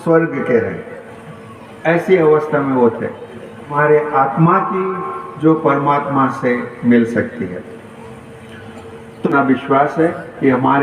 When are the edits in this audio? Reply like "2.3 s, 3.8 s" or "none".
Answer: 3.7 s, 9.3 s